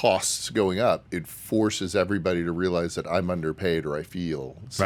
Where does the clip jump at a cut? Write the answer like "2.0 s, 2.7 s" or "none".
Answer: none